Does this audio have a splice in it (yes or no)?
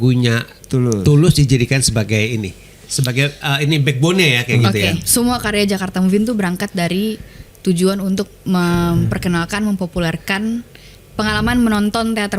yes